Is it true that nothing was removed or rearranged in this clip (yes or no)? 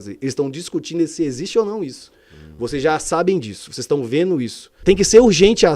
no